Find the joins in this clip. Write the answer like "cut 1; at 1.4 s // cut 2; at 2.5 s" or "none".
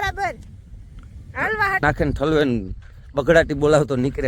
cut 1; at 1.8 s